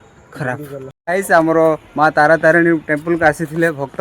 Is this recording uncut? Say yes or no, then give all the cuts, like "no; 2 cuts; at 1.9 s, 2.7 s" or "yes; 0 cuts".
no; 1 cut; at 1.0 s